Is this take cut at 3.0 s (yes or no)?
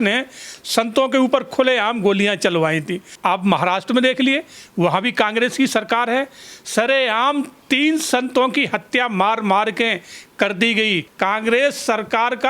yes